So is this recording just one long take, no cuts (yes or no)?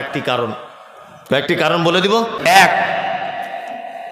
no